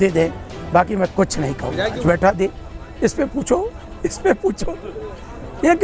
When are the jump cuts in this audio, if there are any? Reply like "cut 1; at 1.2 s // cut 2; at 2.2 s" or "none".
cut 1; at 2.0 s